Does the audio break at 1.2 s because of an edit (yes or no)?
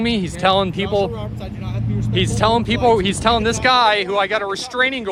no